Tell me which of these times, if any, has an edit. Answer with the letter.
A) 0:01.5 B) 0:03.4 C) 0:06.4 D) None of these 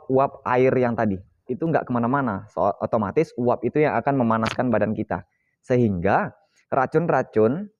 A